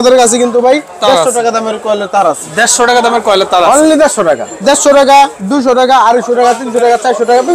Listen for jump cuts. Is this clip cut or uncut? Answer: cut